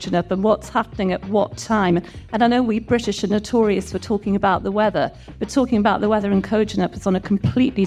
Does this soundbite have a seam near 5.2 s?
no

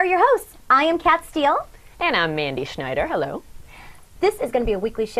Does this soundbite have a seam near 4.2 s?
no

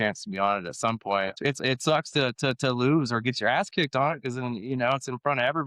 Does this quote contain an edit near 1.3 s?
yes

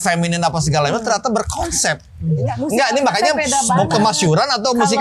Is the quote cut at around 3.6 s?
no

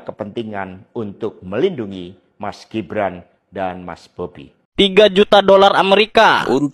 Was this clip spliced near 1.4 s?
no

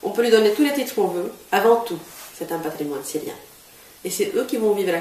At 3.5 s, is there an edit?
no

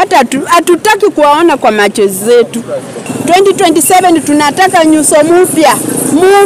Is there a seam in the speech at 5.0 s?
no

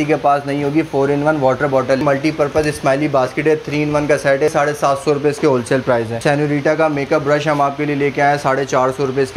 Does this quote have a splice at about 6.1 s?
yes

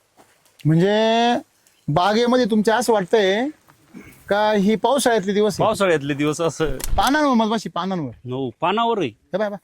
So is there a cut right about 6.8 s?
yes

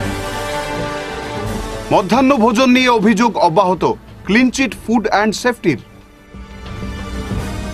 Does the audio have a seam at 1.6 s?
yes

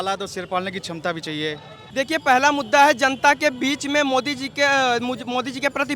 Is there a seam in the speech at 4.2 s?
no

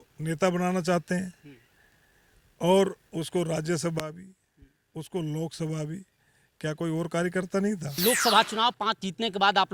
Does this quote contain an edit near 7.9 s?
yes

